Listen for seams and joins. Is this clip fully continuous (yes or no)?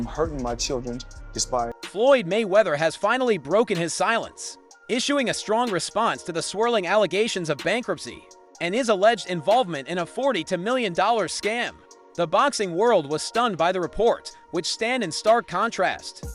no